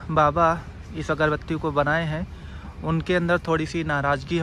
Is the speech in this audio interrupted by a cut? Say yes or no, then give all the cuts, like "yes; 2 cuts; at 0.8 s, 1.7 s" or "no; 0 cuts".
no; 0 cuts